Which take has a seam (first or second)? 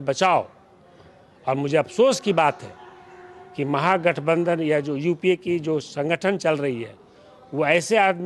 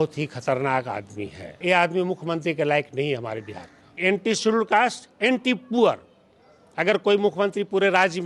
second